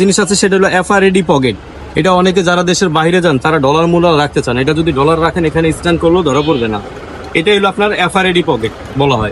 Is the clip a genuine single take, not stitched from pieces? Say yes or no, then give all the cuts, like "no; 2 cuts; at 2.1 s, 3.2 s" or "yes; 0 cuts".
yes; 0 cuts